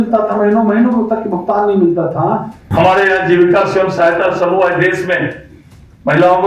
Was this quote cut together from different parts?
yes; 1 cut; at 2.6 s

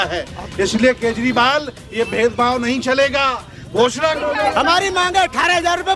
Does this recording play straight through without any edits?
no; 1 cut; at 4.2 s

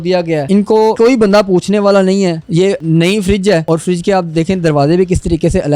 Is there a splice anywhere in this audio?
yes; 3 cuts; at 0.8 s, 2.8 s, 3.6 s

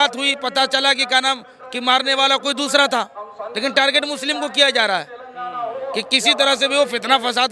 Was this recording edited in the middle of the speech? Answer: no; 0 cuts

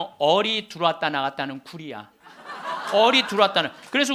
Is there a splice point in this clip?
no; 0 cuts

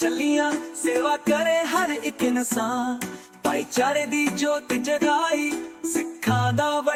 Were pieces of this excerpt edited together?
no; 0 cuts

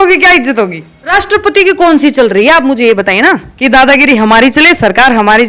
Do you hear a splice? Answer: yes; 2 cuts; at 0.9 s, 3.5 s

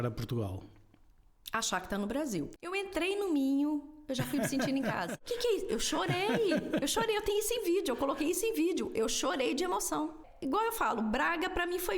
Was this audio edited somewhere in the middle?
yes; 3 cuts; at 2.5 s, 5.2 s, 10.3 s

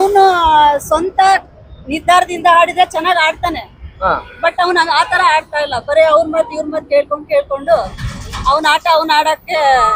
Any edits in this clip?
no; 0 cuts

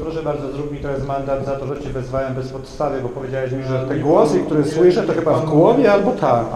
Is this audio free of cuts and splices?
yes; 0 cuts

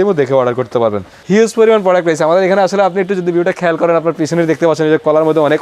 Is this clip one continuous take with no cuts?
no; 1 cut; at 1.1 s

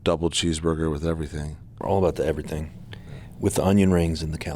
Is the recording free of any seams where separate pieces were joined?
no; 1 cut; at 1.8 s

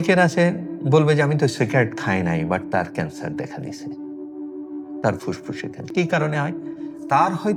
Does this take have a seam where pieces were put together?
no; 0 cuts

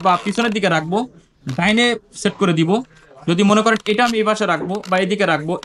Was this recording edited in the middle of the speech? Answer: no; 0 cuts

